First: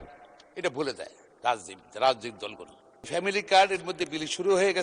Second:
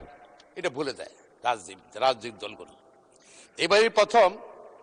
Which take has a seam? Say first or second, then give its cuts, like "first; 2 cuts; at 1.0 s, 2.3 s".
first; 1 cut; at 3.1 s